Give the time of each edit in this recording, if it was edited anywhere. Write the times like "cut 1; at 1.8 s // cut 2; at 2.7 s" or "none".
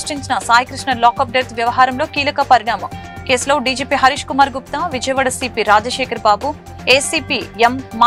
none

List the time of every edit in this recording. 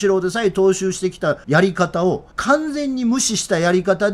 cut 1; at 1.4 s // cut 2; at 2.3 s

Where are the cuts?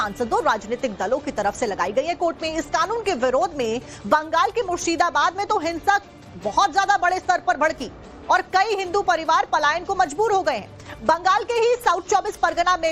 none

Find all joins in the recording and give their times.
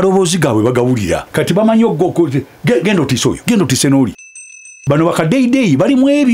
cut 1; at 1.3 s // cut 2; at 3.4 s // cut 3; at 4.7 s

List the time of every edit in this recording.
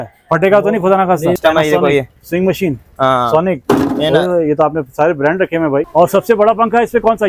cut 1; at 1.4 s // cut 2; at 5.9 s

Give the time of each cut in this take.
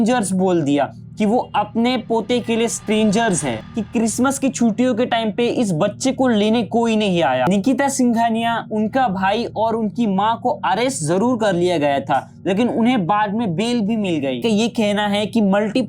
cut 1; at 3.6 s // cut 2; at 7.5 s // cut 3; at 14.4 s

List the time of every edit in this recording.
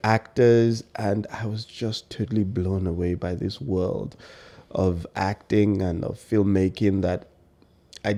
none

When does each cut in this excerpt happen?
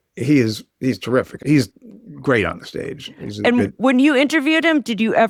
none

